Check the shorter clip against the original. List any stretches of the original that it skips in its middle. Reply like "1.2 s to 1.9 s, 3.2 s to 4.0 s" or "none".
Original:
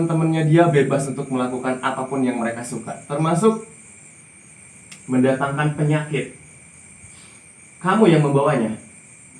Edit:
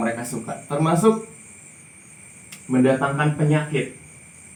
none